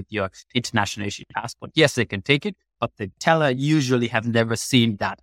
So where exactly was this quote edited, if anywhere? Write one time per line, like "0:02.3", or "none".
none